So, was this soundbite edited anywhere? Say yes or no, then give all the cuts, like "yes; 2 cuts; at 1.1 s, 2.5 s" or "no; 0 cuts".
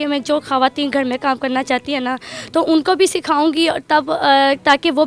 no; 0 cuts